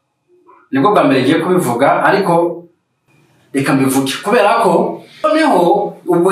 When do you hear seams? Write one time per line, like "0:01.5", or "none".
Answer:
0:05.2